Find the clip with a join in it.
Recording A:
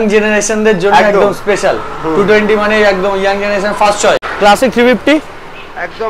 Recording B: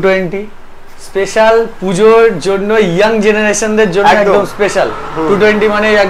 A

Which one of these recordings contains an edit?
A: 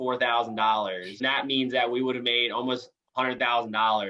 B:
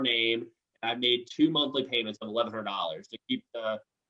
A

